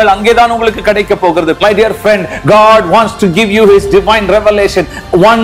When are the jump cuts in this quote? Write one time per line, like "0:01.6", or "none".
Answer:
0:01.6